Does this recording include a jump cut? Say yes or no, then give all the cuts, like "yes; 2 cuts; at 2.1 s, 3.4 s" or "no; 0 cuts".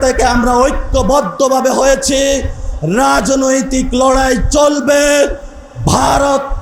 no; 0 cuts